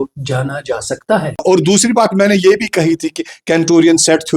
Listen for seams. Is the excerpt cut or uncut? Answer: cut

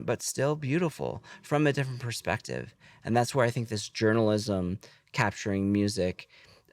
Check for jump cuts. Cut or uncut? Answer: uncut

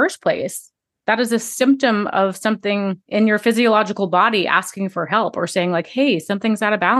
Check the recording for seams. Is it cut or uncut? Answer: cut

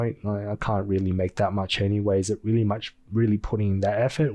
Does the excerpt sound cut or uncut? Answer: uncut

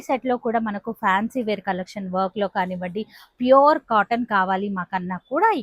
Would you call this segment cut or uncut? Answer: uncut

